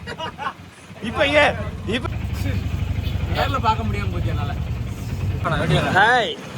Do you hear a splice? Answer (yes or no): yes